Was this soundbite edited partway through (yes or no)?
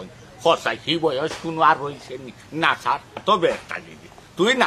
yes